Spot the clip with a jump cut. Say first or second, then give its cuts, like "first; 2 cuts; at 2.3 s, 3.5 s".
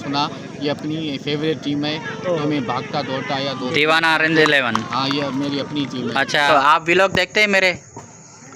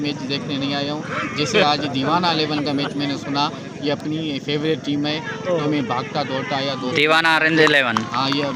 first; 1 cut; at 6.5 s